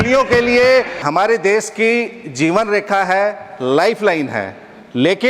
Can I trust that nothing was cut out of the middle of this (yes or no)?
no